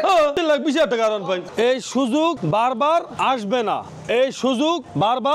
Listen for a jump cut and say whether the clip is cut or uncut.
cut